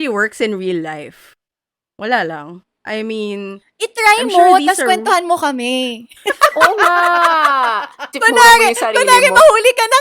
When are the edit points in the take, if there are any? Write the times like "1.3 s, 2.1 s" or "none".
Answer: 8.1 s